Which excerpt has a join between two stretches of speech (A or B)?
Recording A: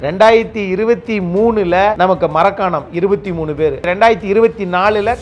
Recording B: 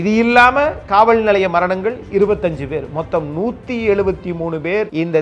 A